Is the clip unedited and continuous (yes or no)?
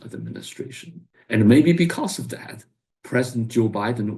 no